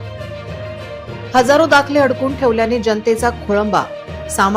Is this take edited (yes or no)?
yes